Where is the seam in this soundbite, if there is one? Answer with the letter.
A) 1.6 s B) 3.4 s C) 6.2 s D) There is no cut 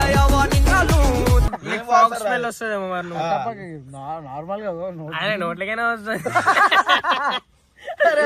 A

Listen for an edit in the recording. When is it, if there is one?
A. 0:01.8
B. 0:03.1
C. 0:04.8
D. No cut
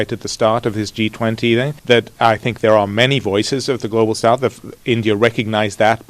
A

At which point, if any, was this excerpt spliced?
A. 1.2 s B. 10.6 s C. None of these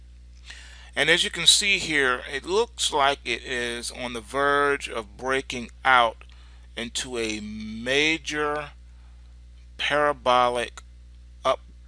B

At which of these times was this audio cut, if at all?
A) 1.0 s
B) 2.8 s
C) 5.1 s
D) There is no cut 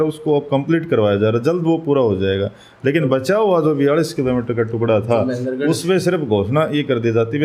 D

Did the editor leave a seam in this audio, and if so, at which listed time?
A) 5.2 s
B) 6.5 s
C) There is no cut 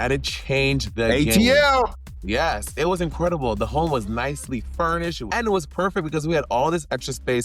A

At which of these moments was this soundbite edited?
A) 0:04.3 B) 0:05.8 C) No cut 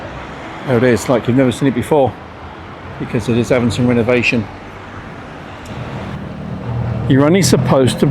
B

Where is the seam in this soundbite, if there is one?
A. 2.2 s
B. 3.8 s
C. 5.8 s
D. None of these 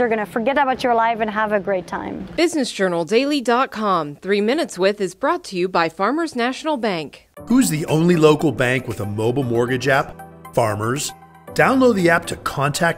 A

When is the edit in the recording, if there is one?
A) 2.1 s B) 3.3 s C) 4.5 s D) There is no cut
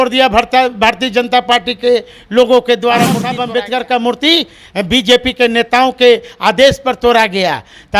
B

